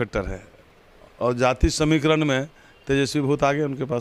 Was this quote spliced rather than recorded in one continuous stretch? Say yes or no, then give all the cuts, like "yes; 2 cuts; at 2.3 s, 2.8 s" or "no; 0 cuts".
no; 0 cuts